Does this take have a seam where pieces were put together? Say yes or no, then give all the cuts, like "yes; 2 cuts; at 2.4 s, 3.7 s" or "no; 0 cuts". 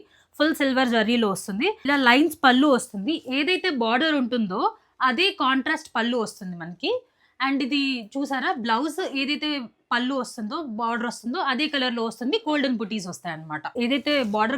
yes; 2 cuts; at 1.8 s, 13.7 s